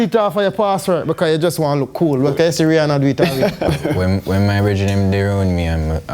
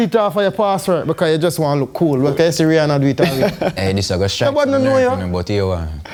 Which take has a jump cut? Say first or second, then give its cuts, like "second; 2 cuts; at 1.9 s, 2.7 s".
first; 1 cut; at 3.7 s